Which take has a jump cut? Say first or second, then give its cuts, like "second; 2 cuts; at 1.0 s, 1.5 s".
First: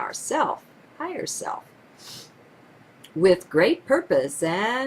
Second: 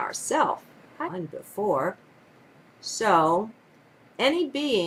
first; 1 cut; at 1.1 s